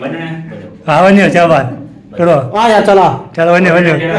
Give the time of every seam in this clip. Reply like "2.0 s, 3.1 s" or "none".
none